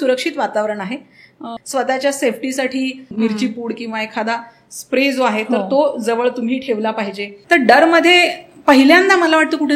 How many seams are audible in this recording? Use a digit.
3